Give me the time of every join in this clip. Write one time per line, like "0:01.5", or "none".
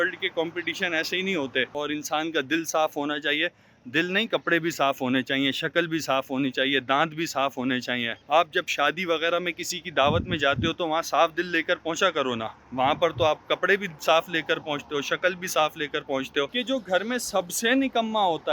0:01.7
0:16.6